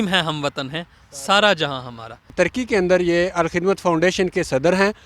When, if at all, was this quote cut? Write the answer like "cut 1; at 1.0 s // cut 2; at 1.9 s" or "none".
cut 1; at 2.2 s